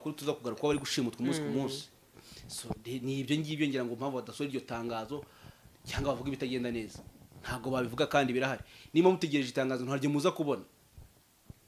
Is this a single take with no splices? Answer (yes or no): yes